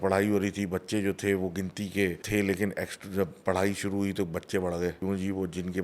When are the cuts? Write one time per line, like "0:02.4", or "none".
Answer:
0:02.2
0:05.0

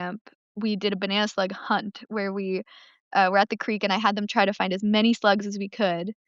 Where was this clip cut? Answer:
none

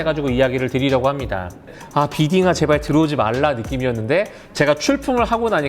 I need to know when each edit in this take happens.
0:01.8

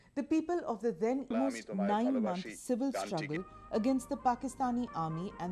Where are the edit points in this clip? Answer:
none

